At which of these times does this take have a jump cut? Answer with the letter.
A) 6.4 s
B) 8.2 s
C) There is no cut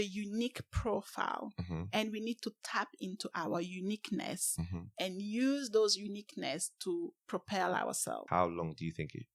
B